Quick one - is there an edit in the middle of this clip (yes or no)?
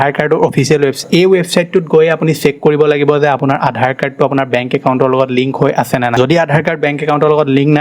yes